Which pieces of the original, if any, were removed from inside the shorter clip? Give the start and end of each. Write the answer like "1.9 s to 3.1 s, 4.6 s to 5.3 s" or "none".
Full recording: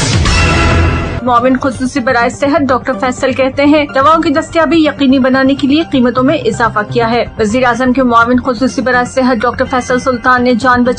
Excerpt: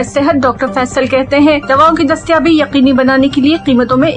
none